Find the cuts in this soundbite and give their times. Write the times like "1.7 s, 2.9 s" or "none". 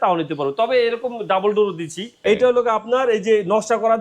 2.1 s